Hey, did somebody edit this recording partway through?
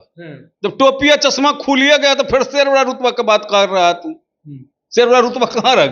no; 0 cuts

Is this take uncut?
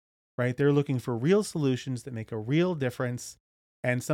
yes; 0 cuts

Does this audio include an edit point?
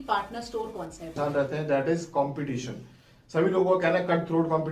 yes; 1 cut; at 1.1 s

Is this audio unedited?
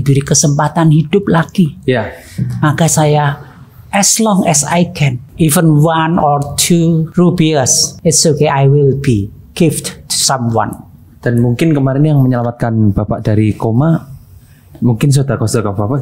no; 3 cuts; at 5.2 s, 7.1 s, 7.8 s

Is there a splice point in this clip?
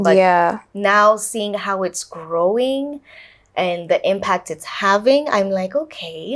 no; 0 cuts

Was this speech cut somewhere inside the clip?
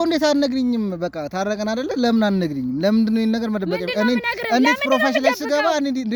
no; 0 cuts

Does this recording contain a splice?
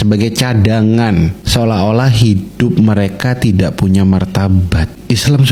no; 0 cuts

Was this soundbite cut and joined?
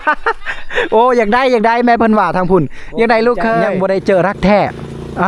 yes; 1 cut; at 3.7 s

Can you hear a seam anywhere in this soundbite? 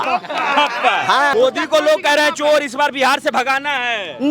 yes; 1 cut; at 1.3 s

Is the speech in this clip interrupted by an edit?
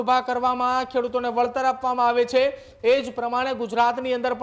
no; 0 cuts

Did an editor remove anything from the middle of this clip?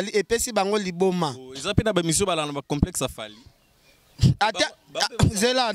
no; 0 cuts

